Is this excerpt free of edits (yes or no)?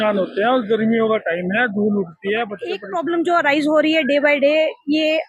no